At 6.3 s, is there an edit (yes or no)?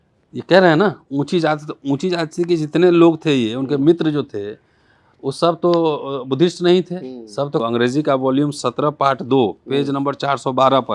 no